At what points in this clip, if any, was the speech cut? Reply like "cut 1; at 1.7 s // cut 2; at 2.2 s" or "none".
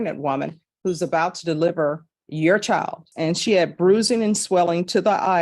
cut 1; at 3.1 s